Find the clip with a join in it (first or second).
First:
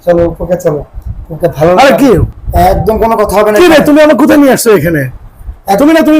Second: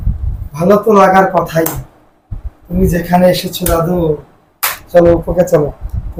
first